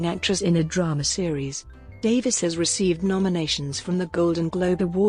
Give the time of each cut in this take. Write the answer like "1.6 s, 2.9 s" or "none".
2.5 s

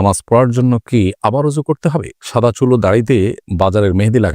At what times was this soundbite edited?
2.2 s, 3.4 s

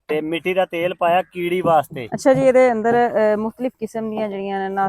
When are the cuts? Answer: 2.0 s

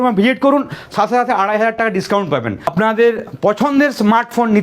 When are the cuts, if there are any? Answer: 2.7 s

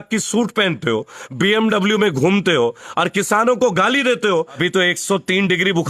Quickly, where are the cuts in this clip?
4.6 s

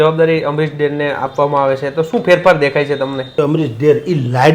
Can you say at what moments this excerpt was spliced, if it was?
3.3 s

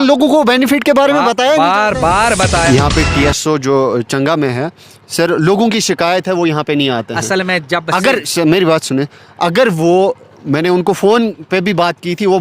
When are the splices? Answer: 2.7 s

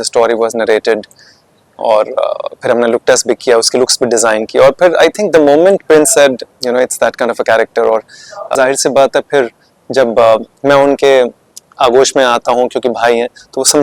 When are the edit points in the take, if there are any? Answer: 8.4 s

